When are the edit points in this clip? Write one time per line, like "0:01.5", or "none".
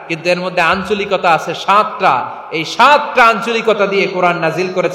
none